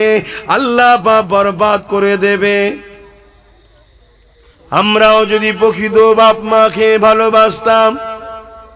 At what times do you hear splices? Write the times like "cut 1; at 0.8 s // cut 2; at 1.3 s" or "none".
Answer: cut 1; at 4.5 s